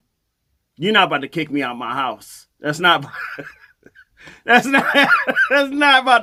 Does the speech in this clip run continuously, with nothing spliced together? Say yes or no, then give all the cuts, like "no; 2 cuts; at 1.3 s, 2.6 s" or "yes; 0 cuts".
yes; 0 cuts